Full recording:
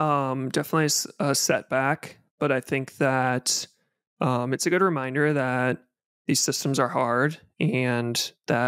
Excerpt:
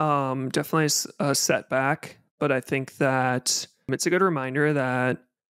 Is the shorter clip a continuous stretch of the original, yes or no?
no